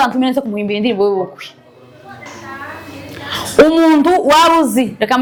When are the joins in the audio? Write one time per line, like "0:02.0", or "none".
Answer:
none